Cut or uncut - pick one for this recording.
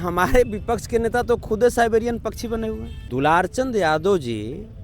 cut